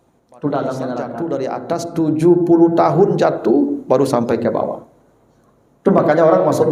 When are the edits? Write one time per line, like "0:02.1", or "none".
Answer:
0:01.2